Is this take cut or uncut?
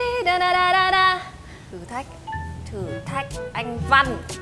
cut